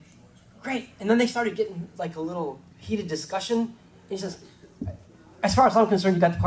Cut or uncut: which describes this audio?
cut